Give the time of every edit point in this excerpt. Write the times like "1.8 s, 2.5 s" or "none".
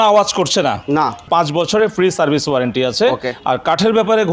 1.2 s